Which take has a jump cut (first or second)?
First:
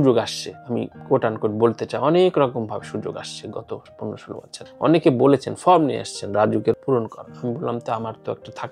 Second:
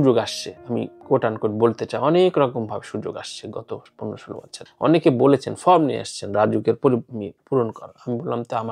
first